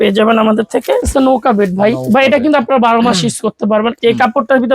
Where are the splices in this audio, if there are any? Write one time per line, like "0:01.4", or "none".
0:01.1
0:03.9